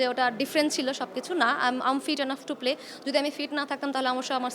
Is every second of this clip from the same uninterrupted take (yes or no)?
yes